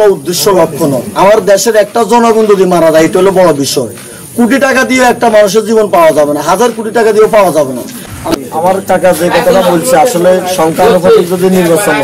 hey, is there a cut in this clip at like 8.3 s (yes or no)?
yes